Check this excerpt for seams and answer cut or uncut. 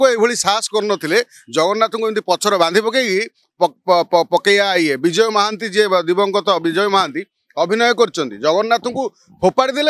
uncut